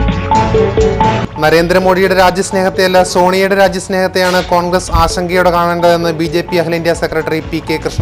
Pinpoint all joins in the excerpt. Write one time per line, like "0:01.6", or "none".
0:01.0